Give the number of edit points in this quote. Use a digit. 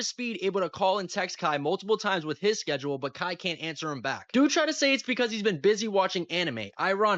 0